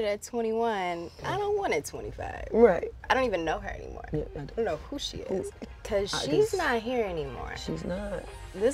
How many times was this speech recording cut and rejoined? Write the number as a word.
two